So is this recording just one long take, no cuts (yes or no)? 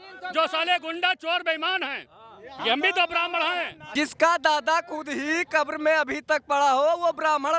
no